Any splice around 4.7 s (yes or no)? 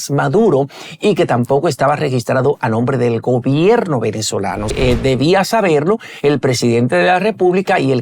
yes